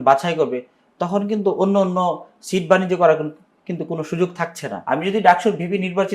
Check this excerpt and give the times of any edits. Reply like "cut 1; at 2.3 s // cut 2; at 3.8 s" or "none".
cut 1; at 4.7 s